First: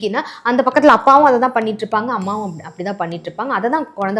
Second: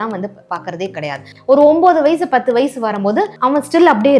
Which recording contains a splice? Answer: second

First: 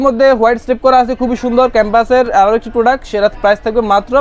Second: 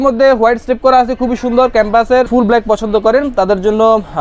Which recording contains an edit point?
second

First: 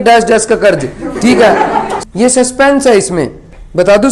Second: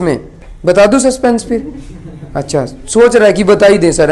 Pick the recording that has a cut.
first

